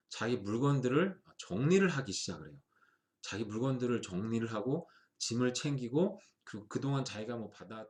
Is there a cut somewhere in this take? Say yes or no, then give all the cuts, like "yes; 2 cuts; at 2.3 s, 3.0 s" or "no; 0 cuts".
no; 0 cuts